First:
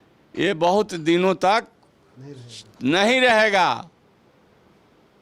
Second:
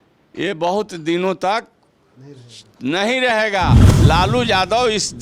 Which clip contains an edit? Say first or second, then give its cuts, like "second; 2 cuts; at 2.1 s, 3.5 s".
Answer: second; 1 cut; at 3.9 s